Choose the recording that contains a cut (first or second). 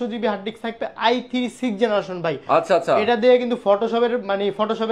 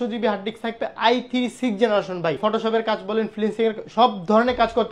second